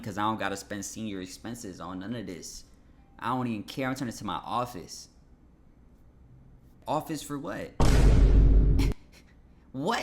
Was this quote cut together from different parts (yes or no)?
yes